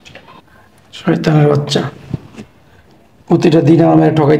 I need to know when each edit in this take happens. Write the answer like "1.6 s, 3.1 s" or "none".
none